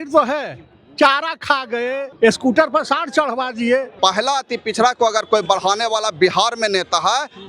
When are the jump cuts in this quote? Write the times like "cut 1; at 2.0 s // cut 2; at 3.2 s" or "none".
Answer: cut 1; at 2.0 s // cut 2; at 3.9 s